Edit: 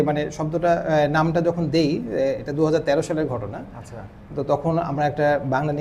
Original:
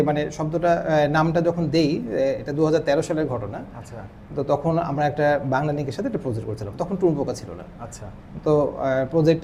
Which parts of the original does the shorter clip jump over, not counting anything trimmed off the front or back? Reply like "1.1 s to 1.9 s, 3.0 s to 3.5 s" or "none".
none